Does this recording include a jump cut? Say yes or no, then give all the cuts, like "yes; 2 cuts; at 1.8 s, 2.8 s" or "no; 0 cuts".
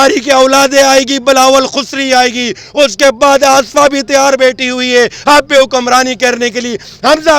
no; 0 cuts